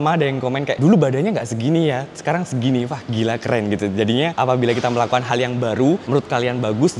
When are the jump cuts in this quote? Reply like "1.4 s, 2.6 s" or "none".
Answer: none